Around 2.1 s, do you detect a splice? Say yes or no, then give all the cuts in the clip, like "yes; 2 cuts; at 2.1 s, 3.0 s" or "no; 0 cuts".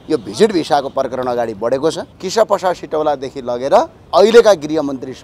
yes; 2 cuts; at 2.1 s, 4.0 s